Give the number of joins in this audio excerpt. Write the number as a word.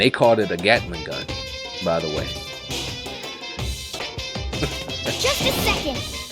one